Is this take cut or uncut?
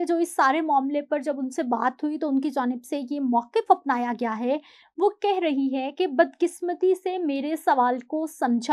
uncut